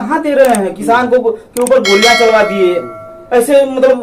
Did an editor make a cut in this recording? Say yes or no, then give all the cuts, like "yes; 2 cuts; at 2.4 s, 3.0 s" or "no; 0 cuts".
no; 0 cuts